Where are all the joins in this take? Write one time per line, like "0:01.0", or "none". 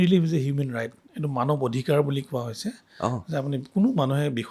none